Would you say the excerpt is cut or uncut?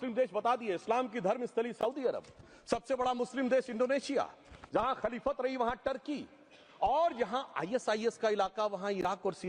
uncut